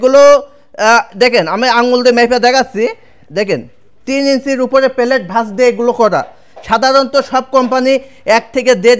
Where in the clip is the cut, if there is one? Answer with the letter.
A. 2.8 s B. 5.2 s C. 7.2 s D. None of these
D